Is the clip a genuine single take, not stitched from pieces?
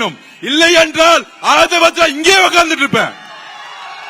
yes; 0 cuts

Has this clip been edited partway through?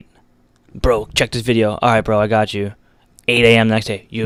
no; 0 cuts

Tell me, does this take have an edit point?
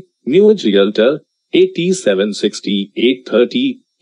no; 0 cuts

